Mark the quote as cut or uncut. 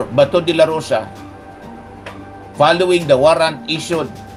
uncut